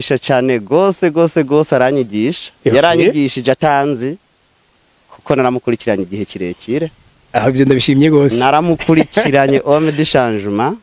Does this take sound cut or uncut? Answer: uncut